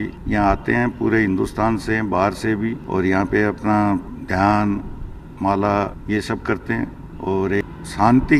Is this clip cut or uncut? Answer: uncut